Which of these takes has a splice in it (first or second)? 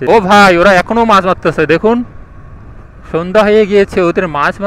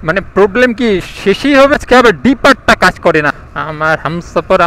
second